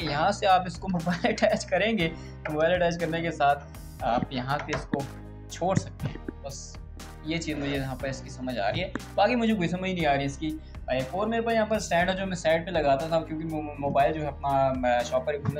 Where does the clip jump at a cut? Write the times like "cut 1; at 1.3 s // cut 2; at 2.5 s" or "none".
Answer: none